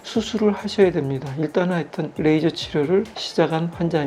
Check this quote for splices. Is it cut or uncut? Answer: cut